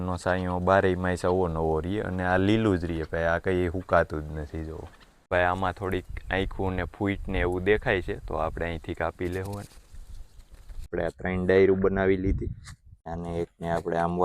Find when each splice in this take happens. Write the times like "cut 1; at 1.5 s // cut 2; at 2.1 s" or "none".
cut 1; at 5.3 s // cut 2; at 10.9 s